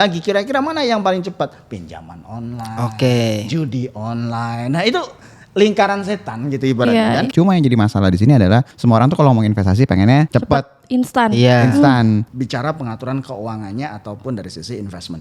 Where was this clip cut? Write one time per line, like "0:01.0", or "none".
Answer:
0:07.3
0:08.7
0:10.3
0:12.3